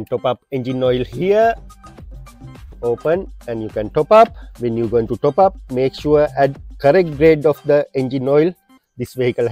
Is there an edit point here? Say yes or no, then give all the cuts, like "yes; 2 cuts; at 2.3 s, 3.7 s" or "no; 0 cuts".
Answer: no; 0 cuts